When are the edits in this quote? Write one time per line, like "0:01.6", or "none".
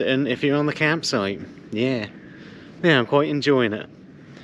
none